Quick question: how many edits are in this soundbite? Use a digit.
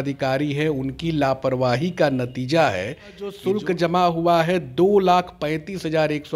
1